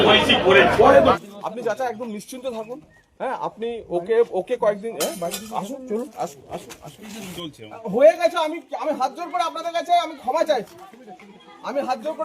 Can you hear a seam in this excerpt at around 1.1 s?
yes; 2 cuts; at 1.1 s, 7.4 s

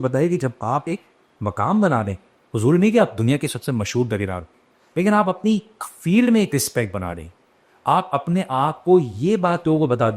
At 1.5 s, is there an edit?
no; 0 cuts

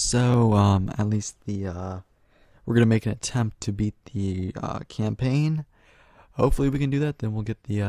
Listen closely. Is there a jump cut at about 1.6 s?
no; 1 cut; at 6.9 s

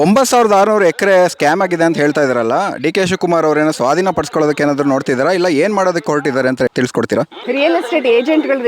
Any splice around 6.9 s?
yes; 1 cut; at 6.9 s

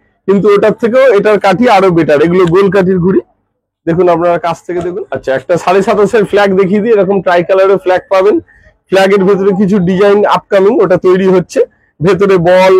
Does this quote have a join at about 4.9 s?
yes; 1 cut; at 4.9 s

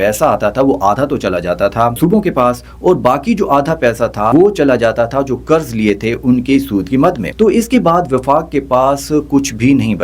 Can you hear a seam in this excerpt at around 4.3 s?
yes; 3 cuts; at 2.0 s, 4.3 s, 7.3 s

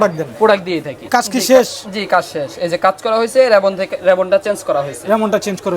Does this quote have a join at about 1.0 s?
yes; 1 cut; at 1.0 s

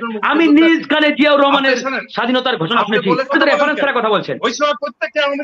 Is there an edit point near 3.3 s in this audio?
yes; 1 cut; at 3.3 s

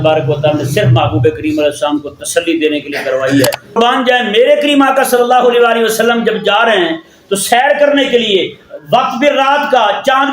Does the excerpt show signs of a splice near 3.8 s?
yes; 1 cut; at 3.8 s

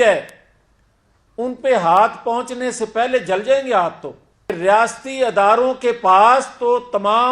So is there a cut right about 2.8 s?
no; 1 cut; at 4.6 s

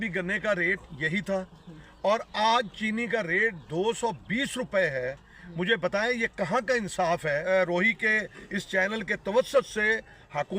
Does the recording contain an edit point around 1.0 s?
no; 1 cut; at 7.4 s

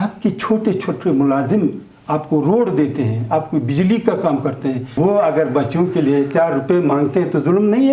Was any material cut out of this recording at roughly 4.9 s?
yes; 1 cut; at 4.9 s

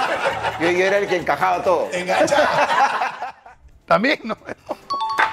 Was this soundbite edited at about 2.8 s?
no; 0 cuts

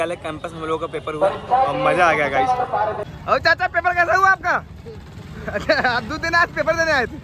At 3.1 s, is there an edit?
yes; 1 cut; at 3.1 s

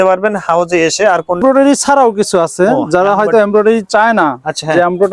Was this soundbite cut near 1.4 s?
yes; 1 cut; at 1.4 s

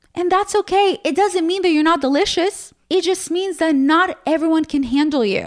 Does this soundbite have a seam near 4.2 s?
no; 1 cut; at 2.7 s

